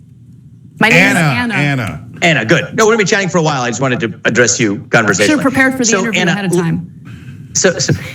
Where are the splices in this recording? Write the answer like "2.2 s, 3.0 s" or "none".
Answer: 3.1 s